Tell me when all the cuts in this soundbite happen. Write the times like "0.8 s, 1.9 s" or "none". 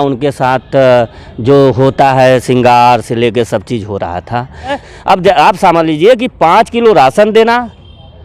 4.8 s